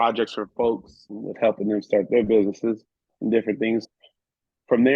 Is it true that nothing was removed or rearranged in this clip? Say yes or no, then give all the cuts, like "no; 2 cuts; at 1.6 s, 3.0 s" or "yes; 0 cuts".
no; 2 cuts; at 1.1 s, 3.8 s